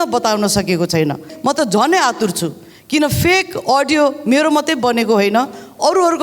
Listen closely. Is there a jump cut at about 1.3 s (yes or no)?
yes